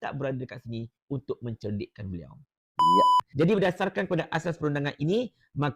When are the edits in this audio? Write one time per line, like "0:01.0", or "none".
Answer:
0:03.2